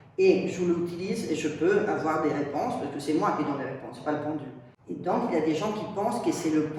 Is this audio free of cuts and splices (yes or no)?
yes